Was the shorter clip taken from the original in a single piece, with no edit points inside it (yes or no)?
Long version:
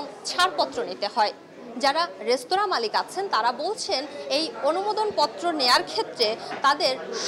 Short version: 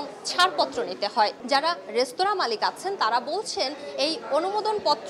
no